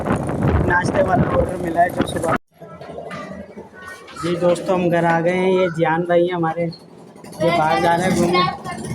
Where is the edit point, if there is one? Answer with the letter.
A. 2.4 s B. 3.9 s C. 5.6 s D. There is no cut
A